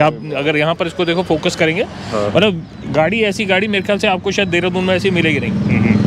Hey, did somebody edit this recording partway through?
no; 0 cuts

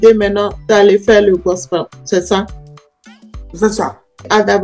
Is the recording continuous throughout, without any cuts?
yes; 0 cuts

